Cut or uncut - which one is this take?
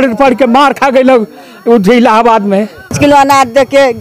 cut